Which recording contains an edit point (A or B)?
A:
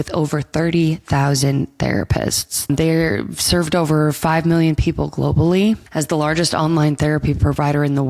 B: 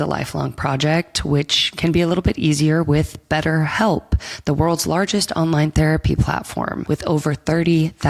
A